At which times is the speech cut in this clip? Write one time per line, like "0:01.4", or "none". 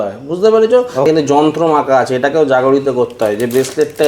0:01.1